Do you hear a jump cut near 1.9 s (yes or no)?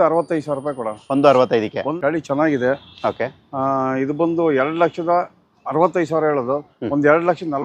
yes